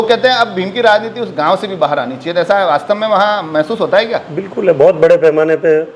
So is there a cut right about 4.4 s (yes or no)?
no